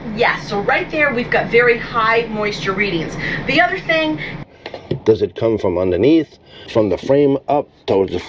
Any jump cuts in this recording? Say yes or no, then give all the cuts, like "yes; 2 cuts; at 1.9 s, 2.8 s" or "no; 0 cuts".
yes; 2 cuts; at 4.3 s, 6.7 s